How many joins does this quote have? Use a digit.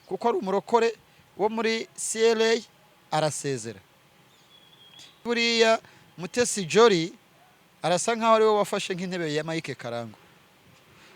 1